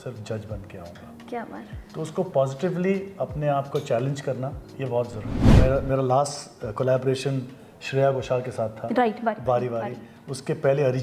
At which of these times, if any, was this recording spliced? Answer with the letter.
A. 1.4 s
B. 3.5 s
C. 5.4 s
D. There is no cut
C